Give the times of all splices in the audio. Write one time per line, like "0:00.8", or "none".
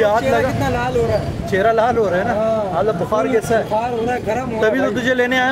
none